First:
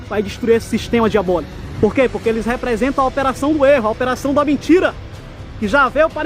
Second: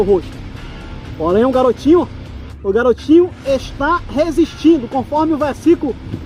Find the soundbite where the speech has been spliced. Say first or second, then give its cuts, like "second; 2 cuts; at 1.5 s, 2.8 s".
first; 1 cut; at 1.6 s